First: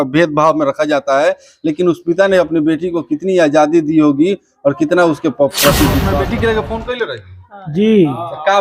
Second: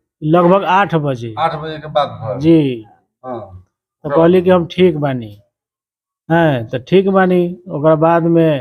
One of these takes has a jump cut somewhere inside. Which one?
first; 1 cut; at 6.1 s

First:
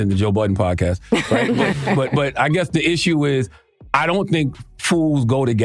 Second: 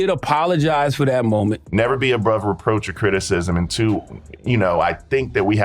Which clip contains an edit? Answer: second; 1 cut; at 1.6 s

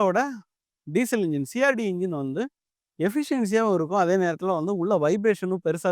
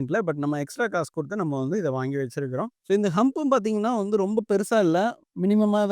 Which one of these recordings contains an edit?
second; 1 cut; at 2.7 s

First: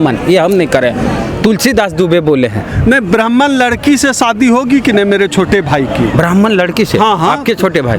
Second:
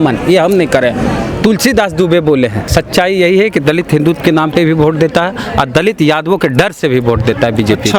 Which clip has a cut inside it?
second; 1 cut; at 2.7 s

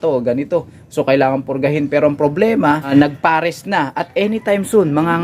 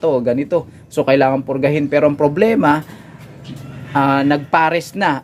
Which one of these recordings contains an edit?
first; 1 cut; at 2.9 s

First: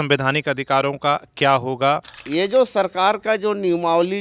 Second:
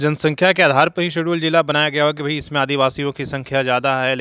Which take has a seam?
first; 1 cut; at 2.2 s

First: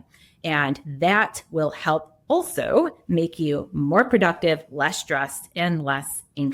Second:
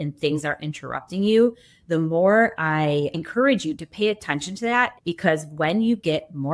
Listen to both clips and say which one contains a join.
second; 2 cuts; at 3.2 s, 4.9 s

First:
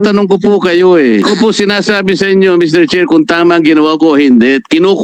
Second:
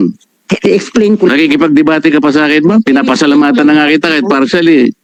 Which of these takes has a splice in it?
first; 1 cut; at 1.2 s

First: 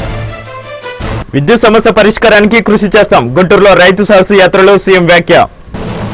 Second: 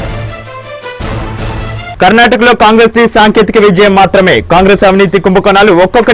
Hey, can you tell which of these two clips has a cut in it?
first; 1 cut; at 1.1 s

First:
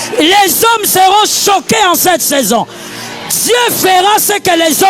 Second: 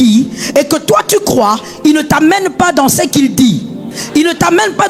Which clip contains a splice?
second; 1 cut; at 3.9 s

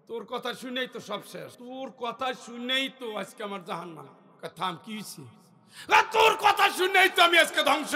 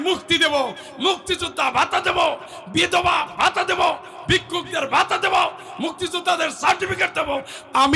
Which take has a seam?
first; 1 cut; at 1.6 s

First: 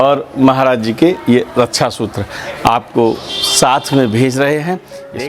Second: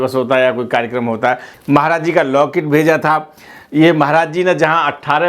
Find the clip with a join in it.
second; 1 cut; at 1.5 s

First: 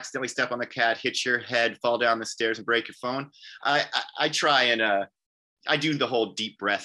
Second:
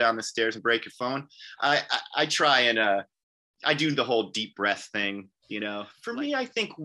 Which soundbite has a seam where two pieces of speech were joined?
second; 1 cut; at 5.9 s

